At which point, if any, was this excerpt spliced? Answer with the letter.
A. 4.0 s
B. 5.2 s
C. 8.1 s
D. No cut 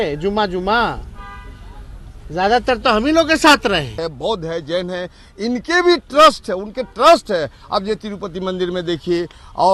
A